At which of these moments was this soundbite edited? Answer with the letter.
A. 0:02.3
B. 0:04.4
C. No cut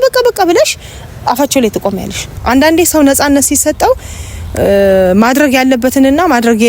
A